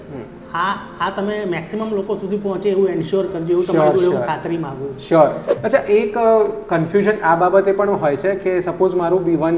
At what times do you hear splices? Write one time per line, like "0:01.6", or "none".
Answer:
0:05.5